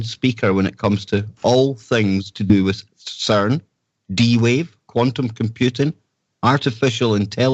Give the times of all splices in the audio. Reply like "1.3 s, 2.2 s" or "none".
3.6 s